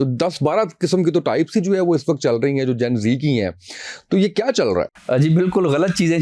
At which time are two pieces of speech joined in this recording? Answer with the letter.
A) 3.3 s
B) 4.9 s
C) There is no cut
C